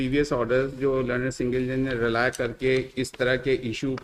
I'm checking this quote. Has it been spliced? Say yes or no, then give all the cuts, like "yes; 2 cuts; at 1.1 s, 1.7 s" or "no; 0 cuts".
no; 0 cuts